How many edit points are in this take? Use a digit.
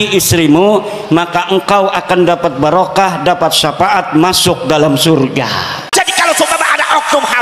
1